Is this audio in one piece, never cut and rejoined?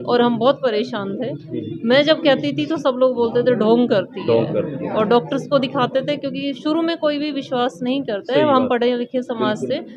yes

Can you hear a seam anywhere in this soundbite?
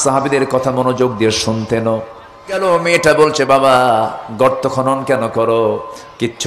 yes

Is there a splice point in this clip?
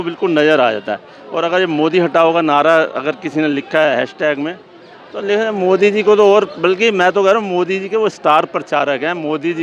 no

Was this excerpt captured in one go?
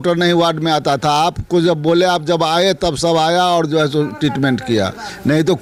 yes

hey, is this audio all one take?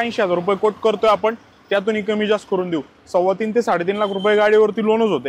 yes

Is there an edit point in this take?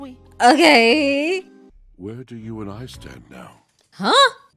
yes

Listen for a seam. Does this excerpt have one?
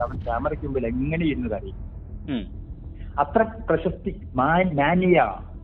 no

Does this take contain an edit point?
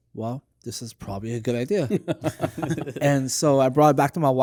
no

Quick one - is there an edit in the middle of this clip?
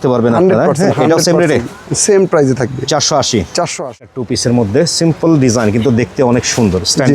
yes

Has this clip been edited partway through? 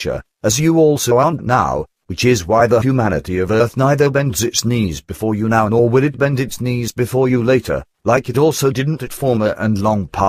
no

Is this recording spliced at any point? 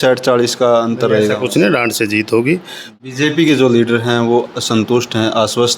yes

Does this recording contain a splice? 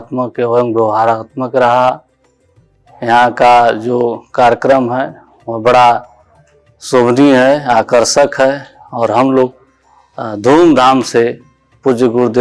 no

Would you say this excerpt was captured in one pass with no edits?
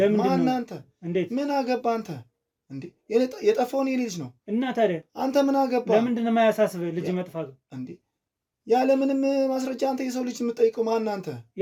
yes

